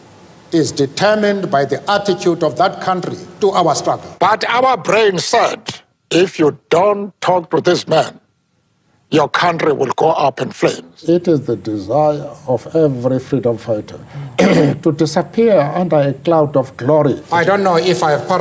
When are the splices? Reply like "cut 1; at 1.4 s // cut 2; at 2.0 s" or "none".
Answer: cut 1; at 4.1 s // cut 2; at 10.9 s // cut 3; at 17.2 s

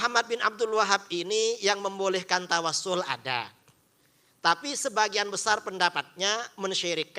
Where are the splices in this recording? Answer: none

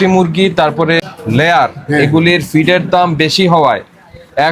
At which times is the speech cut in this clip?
cut 1; at 1.0 s

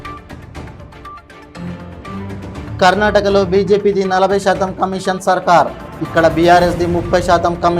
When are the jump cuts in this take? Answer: cut 1; at 1.1 s

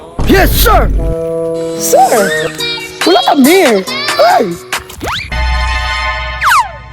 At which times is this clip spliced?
cut 1; at 5.3 s

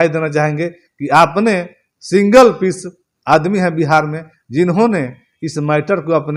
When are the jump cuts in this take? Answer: none

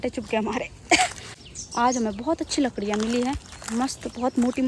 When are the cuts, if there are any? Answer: cut 1; at 1.4 s

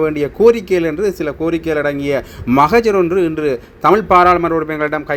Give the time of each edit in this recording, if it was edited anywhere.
none

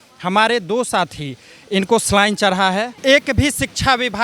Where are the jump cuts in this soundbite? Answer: cut 1; at 2.9 s

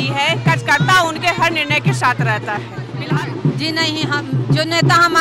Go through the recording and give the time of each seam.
cut 1; at 2.9 s

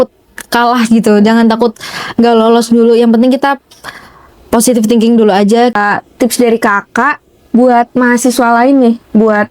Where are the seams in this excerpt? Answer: cut 1; at 5.7 s

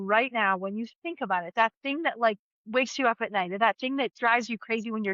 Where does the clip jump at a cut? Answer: cut 1; at 2.5 s // cut 2; at 4.1 s

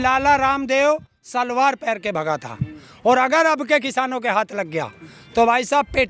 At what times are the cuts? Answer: none

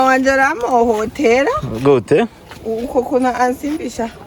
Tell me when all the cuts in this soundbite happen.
none

